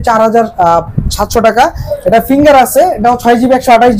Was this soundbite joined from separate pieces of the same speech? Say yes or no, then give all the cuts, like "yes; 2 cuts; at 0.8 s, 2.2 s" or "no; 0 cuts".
no; 0 cuts